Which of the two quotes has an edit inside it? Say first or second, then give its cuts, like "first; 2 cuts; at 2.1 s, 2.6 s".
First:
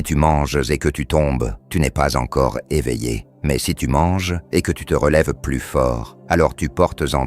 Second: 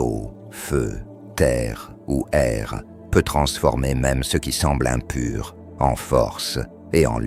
first; 4 cuts; at 1.6 s, 3.3 s, 4.4 s, 6.1 s